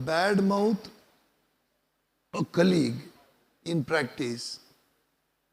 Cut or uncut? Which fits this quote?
uncut